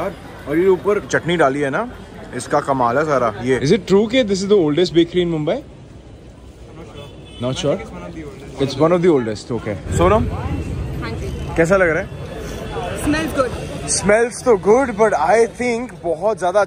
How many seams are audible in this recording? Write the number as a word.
two